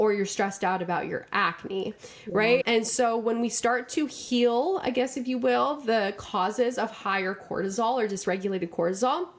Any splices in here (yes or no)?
no